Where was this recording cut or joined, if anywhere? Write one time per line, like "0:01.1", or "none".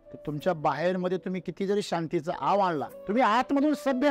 0:02.9

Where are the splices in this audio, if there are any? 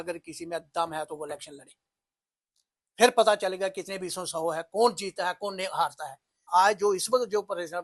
0:06.3

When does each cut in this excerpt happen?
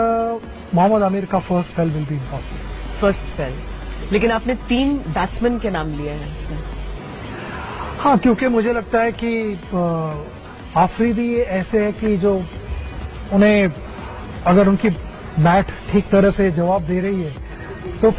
none

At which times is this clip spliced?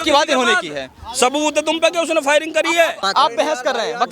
0:03.0

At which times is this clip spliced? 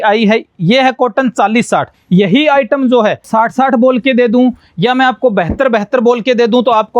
0:02.0
0:03.3

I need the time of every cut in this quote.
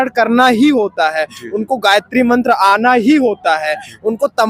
none

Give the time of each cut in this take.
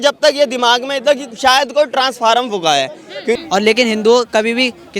0:03.4

